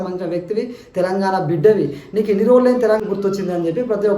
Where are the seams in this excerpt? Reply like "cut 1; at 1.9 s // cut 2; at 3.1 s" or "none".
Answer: cut 1; at 3.0 s